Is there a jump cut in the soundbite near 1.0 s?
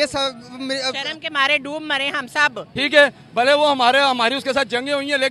no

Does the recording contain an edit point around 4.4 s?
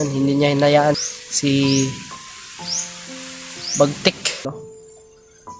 yes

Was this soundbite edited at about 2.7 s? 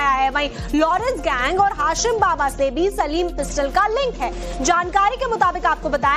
yes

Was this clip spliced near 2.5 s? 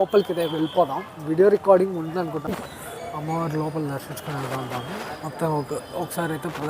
yes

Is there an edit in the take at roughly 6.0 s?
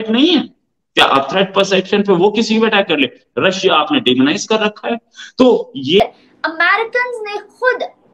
yes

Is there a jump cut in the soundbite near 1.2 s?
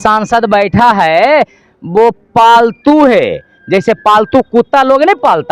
no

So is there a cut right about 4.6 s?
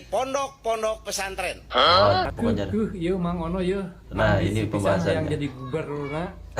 no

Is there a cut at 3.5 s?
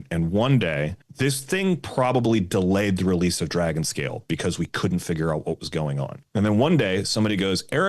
no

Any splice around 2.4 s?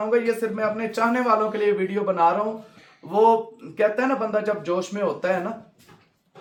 no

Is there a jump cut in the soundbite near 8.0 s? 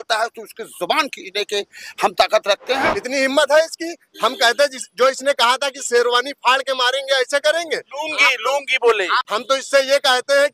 no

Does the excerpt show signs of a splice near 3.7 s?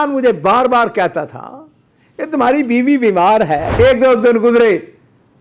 yes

